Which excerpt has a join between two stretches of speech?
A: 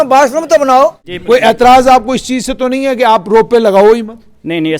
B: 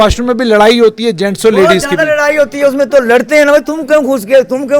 A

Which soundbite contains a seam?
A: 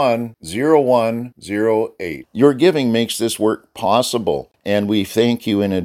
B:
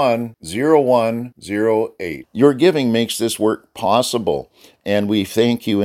A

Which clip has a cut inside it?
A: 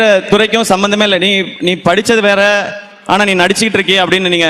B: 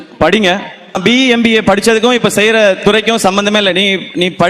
B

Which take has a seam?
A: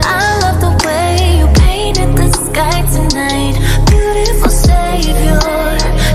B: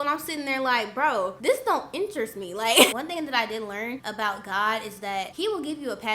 B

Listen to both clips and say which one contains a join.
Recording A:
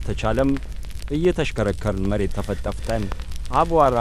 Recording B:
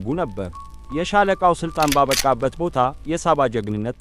B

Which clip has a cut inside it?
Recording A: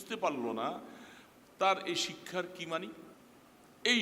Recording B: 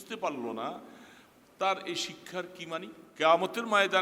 B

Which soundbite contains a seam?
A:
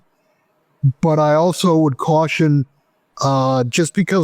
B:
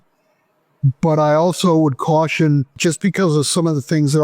B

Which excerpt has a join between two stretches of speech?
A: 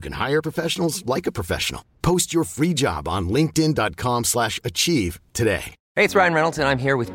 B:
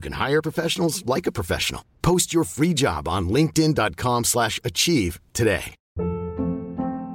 B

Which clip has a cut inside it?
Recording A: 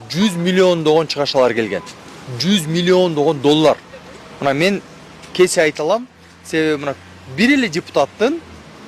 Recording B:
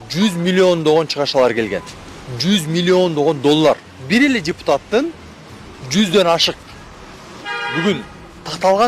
B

